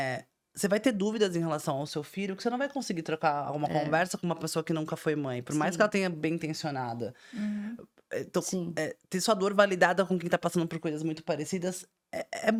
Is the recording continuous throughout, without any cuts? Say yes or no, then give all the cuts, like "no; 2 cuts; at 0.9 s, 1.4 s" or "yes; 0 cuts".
yes; 0 cuts